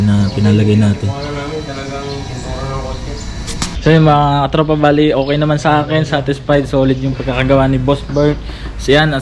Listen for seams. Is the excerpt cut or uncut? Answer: cut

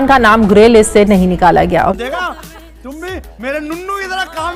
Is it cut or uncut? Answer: uncut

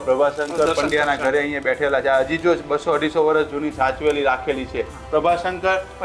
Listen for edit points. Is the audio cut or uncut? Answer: cut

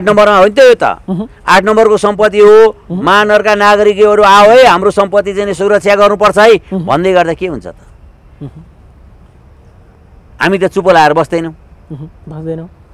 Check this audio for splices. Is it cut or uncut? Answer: uncut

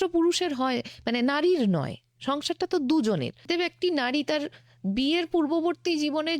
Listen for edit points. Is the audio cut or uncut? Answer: cut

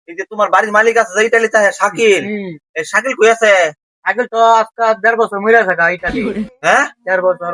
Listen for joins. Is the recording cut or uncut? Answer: uncut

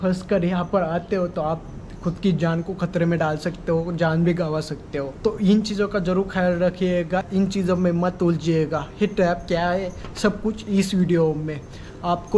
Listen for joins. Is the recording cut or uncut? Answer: cut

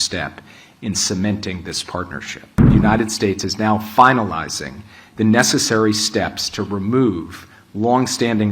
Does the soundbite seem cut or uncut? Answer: cut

